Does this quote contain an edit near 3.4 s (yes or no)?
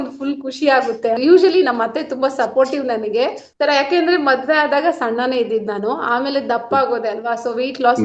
yes